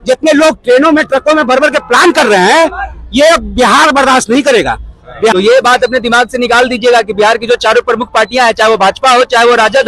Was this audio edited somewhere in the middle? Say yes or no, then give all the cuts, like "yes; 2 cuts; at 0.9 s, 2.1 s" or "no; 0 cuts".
yes; 1 cut; at 5.3 s